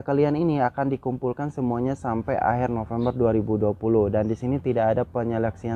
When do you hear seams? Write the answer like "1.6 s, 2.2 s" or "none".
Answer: none